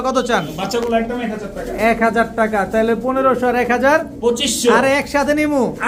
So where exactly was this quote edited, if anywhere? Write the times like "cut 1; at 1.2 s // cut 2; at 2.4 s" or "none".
none